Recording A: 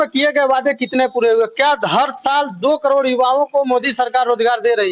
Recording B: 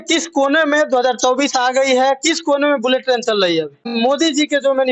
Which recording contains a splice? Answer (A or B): B